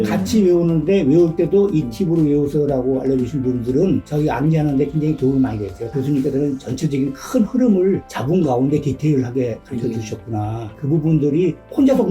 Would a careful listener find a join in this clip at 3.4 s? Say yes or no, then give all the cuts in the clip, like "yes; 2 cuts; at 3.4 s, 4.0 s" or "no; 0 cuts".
no; 1 cut; at 5.9 s